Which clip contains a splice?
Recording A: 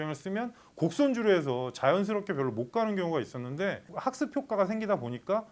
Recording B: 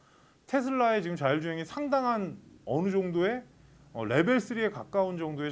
A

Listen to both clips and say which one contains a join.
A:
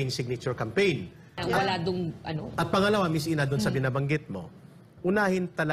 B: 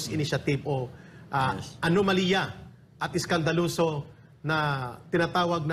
A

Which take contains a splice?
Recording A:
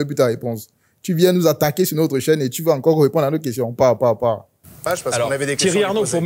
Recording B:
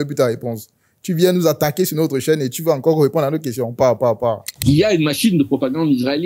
B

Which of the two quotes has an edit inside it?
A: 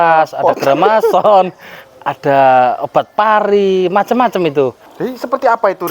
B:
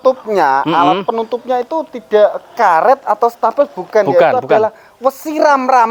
A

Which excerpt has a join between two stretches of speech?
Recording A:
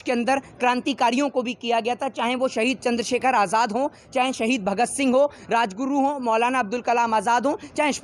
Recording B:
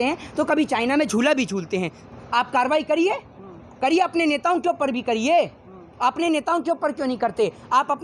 B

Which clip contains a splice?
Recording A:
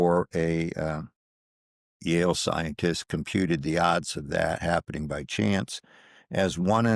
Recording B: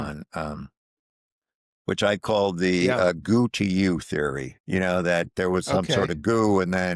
B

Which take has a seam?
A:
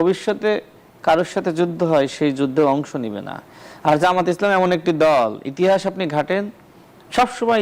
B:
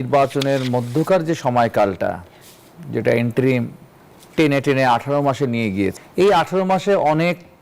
B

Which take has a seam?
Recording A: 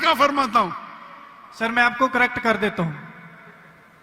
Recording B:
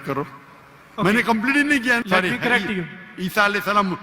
B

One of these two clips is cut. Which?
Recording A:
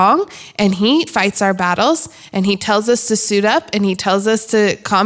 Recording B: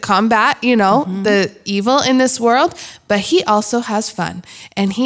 A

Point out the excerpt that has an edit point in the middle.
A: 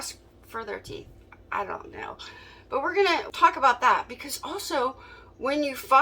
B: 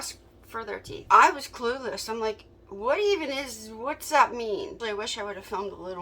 B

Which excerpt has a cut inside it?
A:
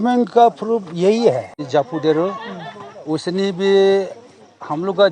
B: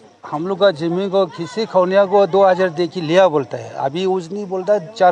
A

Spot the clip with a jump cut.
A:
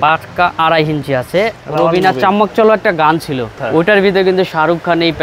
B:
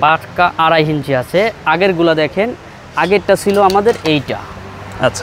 A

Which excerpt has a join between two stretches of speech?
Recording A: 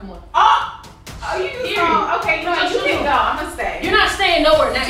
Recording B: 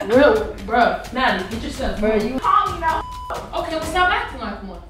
B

